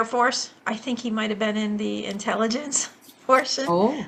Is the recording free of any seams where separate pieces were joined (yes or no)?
yes